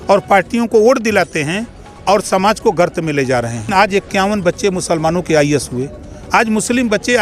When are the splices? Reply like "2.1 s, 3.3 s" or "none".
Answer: 3.7 s